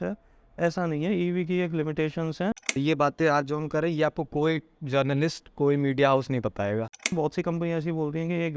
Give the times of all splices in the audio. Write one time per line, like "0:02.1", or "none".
0:02.5
0:07.0